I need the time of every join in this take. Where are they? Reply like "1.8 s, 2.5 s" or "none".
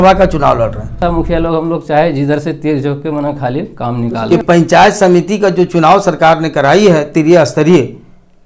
1.0 s, 4.2 s